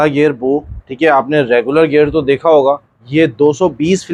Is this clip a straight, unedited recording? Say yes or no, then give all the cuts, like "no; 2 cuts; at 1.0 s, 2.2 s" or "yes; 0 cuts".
yes; 0 cuts